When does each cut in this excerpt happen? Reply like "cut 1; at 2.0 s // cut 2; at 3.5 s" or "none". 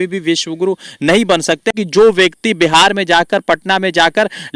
cut 1; at 1.7 s